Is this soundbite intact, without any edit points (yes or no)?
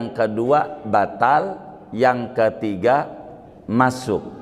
yes